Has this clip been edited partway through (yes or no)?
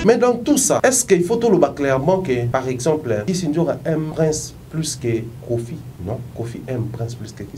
yes